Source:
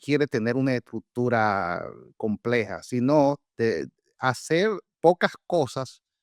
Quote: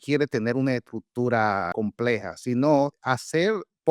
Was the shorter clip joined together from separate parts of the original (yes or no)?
yes